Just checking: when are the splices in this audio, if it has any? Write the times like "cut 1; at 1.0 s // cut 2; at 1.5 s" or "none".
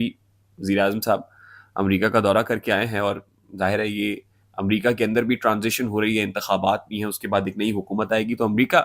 none